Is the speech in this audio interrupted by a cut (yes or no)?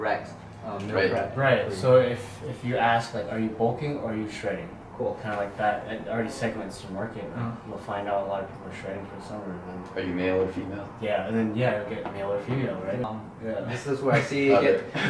yes